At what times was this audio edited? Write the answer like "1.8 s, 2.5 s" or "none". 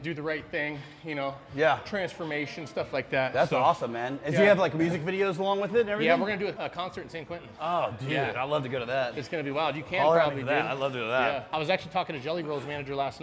6.6 s